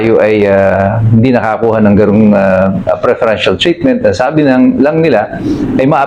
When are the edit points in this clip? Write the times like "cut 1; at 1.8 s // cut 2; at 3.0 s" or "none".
none